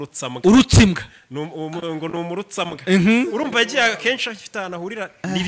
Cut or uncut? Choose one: uncut